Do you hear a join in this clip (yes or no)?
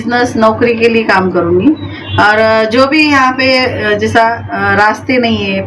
no